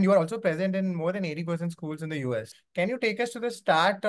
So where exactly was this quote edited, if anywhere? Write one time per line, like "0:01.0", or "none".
0:02.6